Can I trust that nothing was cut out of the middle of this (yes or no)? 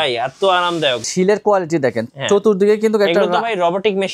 no